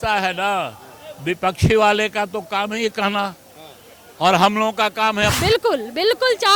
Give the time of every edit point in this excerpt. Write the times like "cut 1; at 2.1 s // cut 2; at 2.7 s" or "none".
cut 1; at 5.4 s

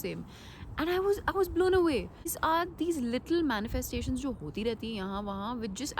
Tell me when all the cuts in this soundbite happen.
cut 1; at 2.4 s

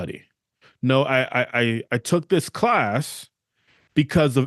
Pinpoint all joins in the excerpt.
none

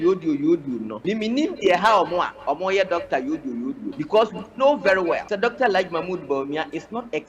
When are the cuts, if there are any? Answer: cut 1; at 1.0 s // cut 2; at 3.9 s // cut 3; at 5.3 s

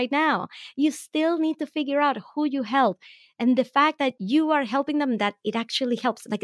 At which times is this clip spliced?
cut 1; at 4.2 s

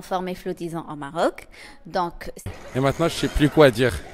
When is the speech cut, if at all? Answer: cut 1; at 2.5 s

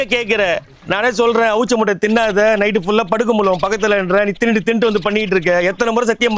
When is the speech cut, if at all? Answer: none

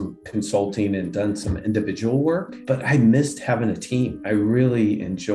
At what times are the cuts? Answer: cut 1; at 2.6 s // cut 2; at 4.2 s

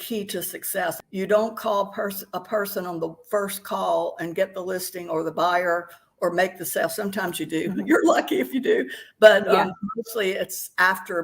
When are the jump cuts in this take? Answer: cut 1; at 1.0 s

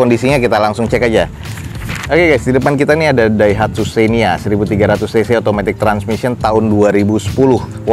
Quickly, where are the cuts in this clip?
none

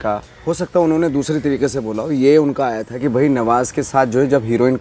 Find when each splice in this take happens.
none

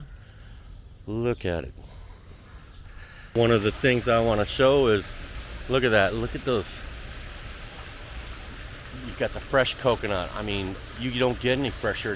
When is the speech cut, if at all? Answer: cut 1; at 3.4 s

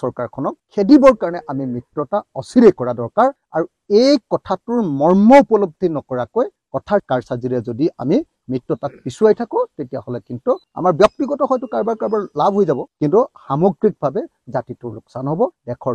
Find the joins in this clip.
cut 1; at 10.7 s

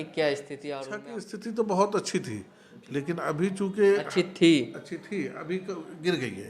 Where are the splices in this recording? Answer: cut 1; at 1.0 s

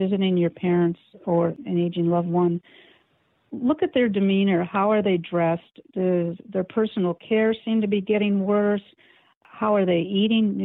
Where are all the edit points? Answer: cut 1; at 1.6 s

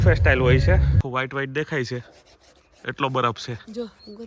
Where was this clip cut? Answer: cut 1; at 1.0 s

